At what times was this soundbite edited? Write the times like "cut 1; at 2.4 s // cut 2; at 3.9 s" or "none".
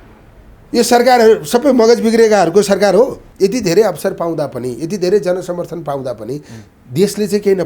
cut 1; at 3.2 s